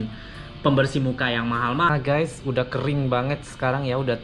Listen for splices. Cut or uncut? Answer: cut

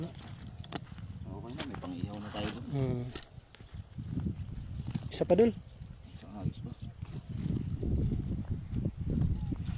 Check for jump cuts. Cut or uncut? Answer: cut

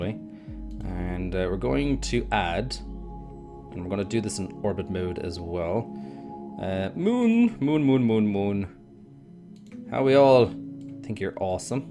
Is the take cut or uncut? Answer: uncut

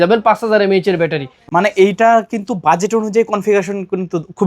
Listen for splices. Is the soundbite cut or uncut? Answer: cut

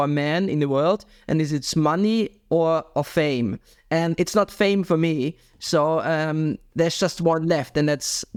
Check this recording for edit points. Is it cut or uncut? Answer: uncut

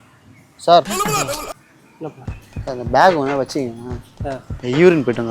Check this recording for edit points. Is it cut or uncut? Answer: cut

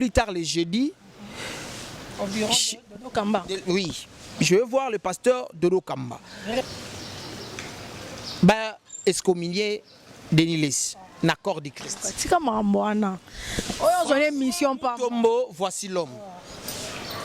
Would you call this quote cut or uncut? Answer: cut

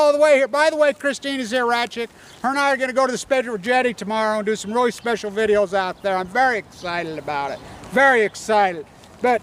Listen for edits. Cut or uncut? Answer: uncut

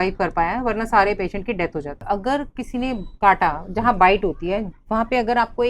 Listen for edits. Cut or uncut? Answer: cut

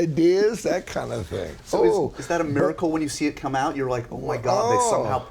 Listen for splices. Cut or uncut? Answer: uncut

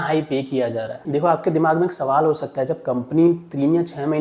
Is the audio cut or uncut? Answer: cut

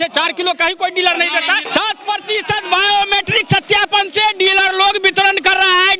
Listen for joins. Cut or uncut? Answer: cut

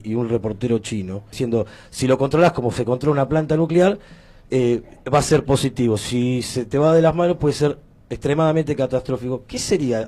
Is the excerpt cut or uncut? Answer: cut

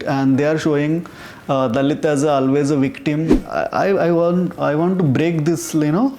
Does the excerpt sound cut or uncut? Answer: cut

